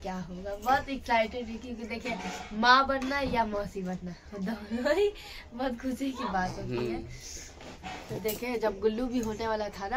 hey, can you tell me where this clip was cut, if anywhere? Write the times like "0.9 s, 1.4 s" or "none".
none